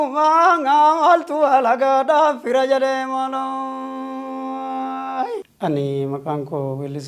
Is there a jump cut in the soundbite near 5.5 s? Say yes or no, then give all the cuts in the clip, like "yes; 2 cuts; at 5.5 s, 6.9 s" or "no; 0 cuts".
yes; 1 cut; at 5.5 s